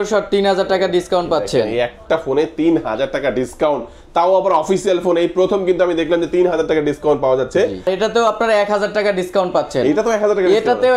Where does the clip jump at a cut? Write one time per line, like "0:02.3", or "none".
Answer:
0:07.9